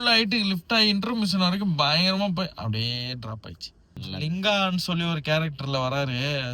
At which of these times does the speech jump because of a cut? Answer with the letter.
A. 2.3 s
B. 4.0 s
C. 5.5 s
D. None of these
B